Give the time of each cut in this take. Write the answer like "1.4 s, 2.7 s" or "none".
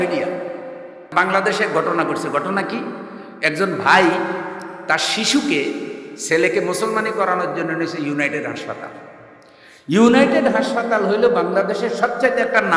1.1 s

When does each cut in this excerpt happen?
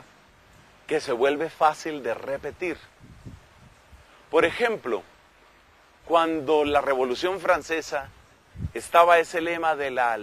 6.2 s

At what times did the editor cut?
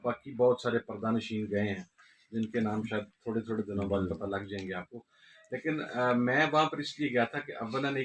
none

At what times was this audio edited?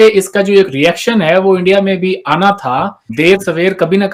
none

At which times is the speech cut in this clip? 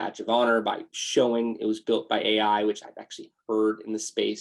none

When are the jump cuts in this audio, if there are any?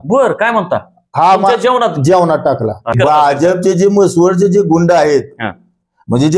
2.9 s

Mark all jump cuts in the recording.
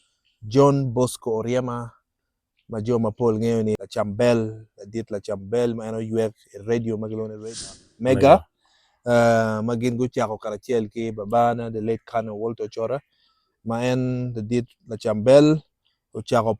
3.8 s, 7.7 s

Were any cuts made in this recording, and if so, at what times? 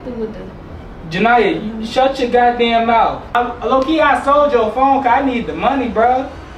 3.2 s

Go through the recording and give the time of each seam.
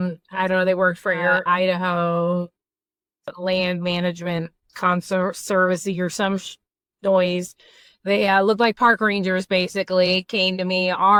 none

